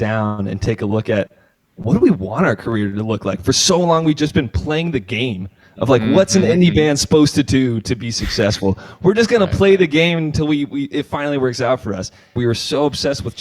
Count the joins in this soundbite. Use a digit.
1